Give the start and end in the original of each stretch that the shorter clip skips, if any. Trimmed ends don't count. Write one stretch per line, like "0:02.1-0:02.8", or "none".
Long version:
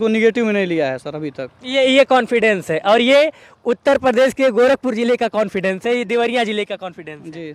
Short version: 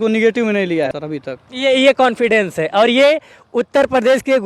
0:01.0-0:01.1